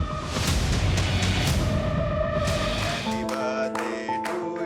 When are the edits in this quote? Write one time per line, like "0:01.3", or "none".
0:02.9

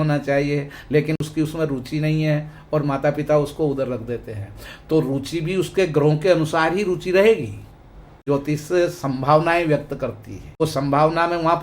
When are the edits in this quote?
0:08.2
0:10.6

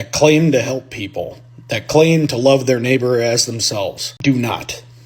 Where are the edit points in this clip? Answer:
0:04.1

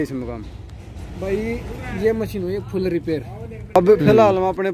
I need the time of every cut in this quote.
0:03.8

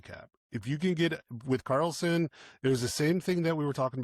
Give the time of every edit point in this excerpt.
none

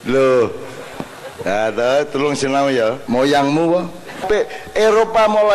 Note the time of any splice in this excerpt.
0:03.0
0:04.2

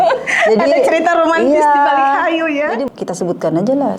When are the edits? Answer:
0:02.8

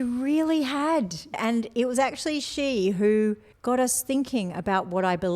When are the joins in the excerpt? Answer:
0:01.4
0:03.5

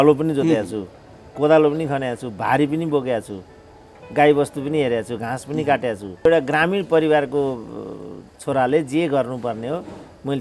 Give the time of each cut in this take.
0:06.3

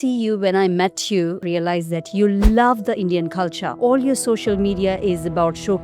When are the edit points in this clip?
0:01.4
0:03.6

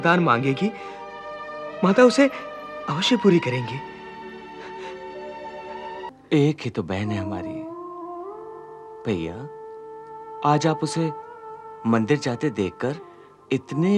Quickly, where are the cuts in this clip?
0:06.1

